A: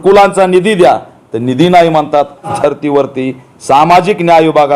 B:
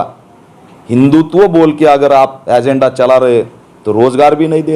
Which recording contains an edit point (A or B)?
A